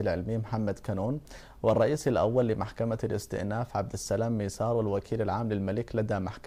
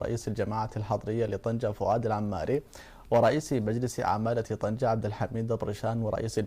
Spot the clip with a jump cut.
second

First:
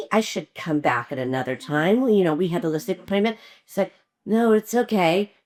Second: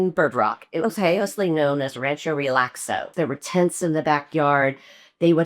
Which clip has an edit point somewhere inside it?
second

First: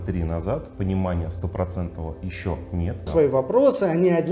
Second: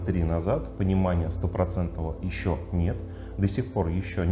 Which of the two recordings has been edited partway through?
first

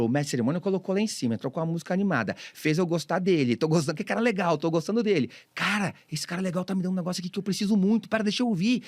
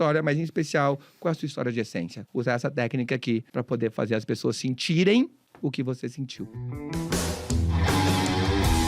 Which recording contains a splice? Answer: second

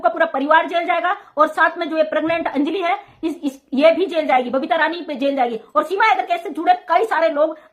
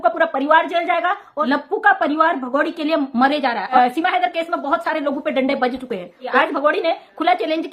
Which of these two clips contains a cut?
second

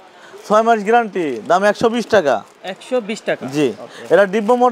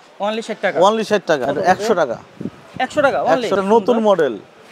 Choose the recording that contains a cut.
second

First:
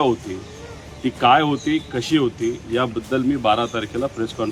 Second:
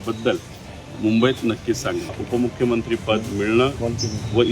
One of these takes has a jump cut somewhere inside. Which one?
second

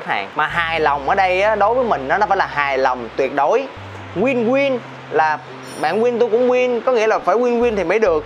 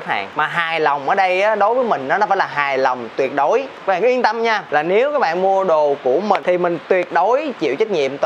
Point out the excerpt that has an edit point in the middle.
second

